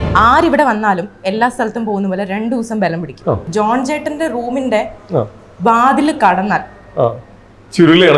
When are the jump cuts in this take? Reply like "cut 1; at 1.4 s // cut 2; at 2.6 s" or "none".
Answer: cut 1; at 3.4 s